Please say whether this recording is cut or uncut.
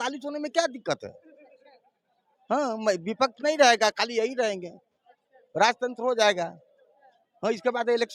uncut